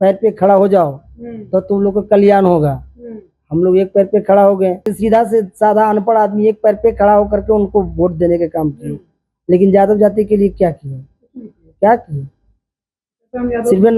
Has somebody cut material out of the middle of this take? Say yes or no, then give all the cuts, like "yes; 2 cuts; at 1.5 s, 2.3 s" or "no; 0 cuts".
yes; 1 cut; at 4.9 s